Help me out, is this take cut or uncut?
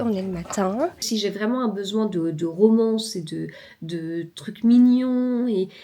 cut